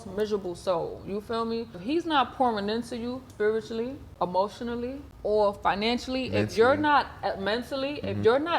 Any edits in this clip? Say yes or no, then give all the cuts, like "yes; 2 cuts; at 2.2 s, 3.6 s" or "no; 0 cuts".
yes; 4 cuts; at 1.8 s, 3.2 s, 4.1 s, 5.1 s